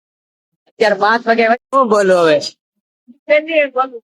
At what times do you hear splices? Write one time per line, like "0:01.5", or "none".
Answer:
0:01.6